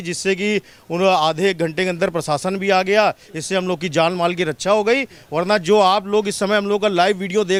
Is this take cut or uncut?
uncut